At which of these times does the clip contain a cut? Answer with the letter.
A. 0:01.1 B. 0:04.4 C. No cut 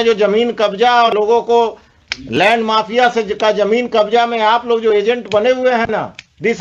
A